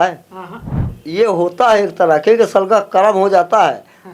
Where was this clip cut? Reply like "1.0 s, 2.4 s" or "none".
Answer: 1.0 s